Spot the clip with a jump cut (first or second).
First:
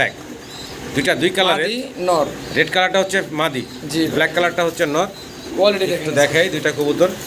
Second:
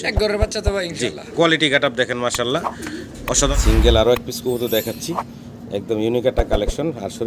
second